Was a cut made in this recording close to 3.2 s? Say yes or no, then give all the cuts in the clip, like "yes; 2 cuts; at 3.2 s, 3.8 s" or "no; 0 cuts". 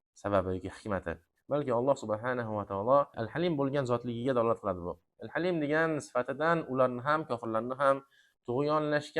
yes; 1 cut; at 3.2 s